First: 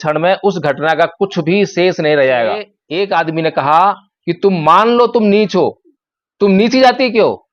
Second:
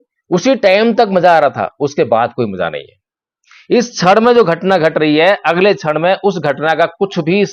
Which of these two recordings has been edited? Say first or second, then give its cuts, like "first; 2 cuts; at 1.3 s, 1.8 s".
first; 1 cut; at 2.8 s